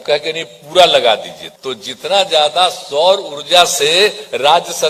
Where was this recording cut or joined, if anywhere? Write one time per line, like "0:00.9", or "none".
0:01.4